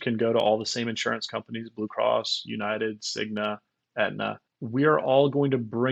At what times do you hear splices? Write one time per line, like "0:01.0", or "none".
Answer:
none